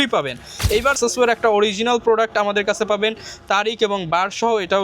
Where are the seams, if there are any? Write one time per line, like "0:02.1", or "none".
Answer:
0:00.9